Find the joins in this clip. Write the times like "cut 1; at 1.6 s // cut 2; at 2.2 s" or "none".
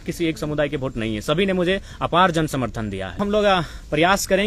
cut 1; at 3.2 s